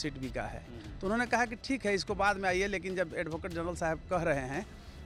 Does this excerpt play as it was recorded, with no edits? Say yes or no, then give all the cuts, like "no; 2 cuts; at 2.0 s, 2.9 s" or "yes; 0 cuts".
yes; 0 cuts